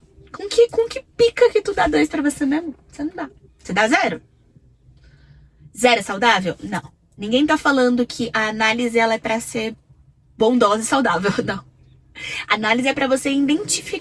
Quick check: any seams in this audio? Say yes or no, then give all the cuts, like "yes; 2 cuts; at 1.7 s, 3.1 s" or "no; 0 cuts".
no; 0 cuts